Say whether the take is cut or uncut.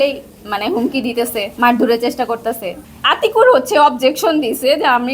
cut